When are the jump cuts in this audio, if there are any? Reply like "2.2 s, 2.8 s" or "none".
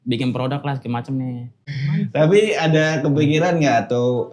1.8 s

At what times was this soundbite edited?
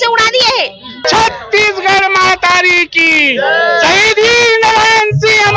1.0 s

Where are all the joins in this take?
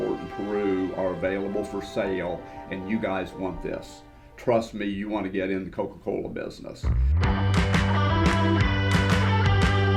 none

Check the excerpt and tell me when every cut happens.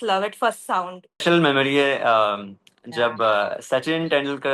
1.2 s

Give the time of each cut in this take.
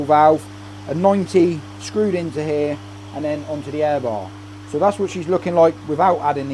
none

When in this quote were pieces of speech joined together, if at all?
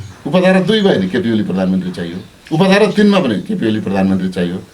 none

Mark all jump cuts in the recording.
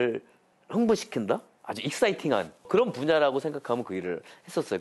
2.7 s

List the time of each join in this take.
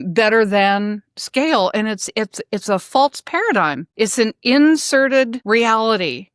3.8 s, 5.4 s

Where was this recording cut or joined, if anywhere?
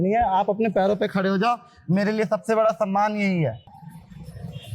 3.7 s

